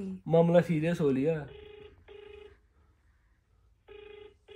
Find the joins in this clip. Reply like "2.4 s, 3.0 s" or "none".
none